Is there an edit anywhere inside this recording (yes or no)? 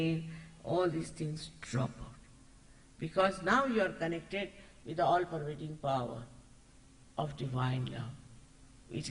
no